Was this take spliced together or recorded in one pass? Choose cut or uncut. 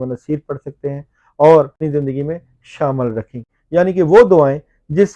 cut